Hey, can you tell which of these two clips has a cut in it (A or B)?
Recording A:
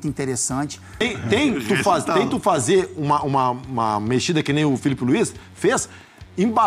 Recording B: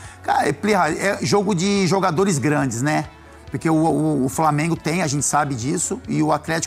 A